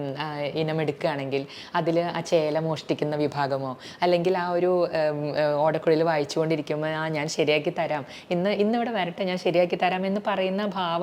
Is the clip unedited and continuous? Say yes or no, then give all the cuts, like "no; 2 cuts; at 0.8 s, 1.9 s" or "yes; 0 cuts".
yes; 0 cuts